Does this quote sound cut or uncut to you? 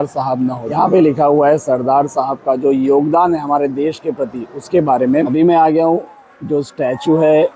cut